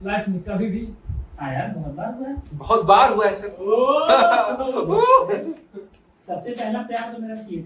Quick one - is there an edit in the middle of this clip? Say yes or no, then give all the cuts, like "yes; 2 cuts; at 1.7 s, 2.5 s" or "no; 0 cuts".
no; 0 cuts